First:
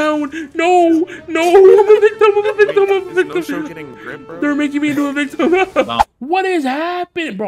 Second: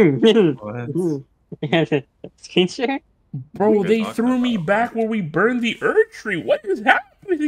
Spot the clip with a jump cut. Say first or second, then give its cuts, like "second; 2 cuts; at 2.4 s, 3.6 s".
first; 1 cut; at 6.1 s